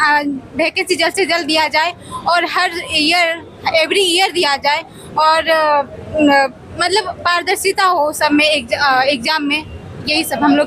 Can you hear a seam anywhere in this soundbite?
no; 0 cuts

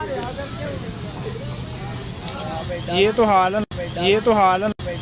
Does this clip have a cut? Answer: no; 0 cuts

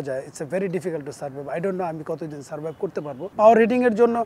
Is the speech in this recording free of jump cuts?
no; 1 cut; at 3.3 s

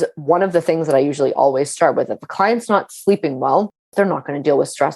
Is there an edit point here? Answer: yes; 1 cut; at 3.8 s

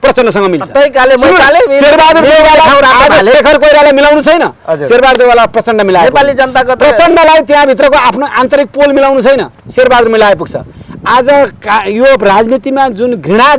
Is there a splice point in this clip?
no; 0 cuts

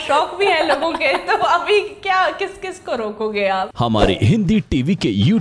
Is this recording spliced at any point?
yes; 1 cut; at 3.7 s

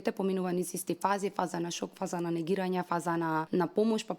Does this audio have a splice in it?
yes; 1 cut; at 3.2 s

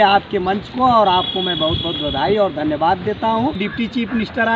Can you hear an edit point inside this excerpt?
yes; 1 cut; at 3.6 s

